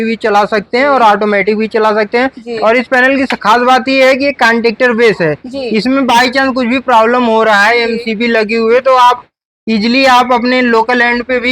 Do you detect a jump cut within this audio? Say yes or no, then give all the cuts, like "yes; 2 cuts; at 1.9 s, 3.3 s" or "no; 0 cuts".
no; 0 cuts